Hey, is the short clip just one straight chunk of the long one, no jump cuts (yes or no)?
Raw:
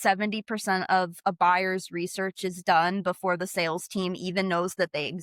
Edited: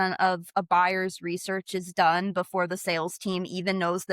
yes